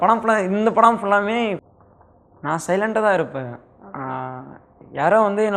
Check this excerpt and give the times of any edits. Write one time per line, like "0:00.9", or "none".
0:01.6